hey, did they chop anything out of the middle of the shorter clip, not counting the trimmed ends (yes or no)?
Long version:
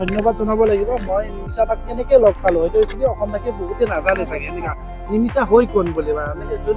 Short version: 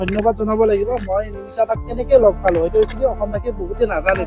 no